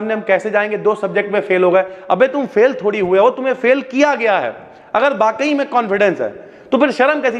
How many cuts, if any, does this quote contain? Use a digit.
0